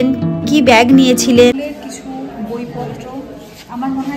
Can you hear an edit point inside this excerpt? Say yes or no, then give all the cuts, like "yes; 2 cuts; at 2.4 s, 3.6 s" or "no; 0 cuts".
yes; 1 cut; at 1.5 s